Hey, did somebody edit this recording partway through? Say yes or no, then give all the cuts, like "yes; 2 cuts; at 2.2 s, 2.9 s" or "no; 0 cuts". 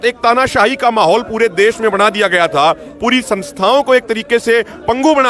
no; 0 cuts